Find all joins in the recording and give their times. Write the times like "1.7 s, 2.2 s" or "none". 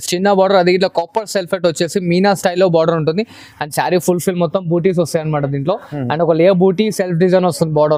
none